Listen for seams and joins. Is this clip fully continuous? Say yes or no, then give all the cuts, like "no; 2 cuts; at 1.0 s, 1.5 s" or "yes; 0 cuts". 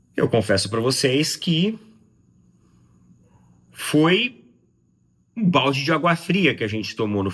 yes; 0 cuts